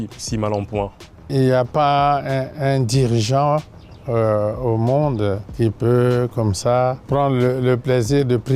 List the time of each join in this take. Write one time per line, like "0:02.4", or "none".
0:01.2
0:05.5
0:07.0